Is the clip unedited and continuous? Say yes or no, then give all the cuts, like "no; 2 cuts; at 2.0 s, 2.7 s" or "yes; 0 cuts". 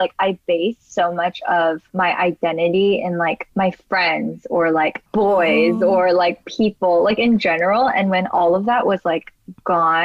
no; 3 cuts; at 1.8 s, 3.4 s, 5.0 s